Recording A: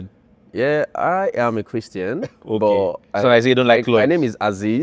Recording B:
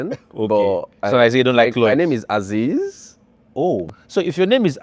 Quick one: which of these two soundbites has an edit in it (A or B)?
B